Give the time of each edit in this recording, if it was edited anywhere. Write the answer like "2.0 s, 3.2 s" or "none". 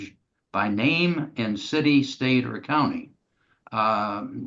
none